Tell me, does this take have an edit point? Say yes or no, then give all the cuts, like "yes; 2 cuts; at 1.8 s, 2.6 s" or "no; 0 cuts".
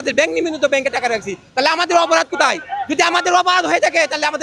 no; 0 cuts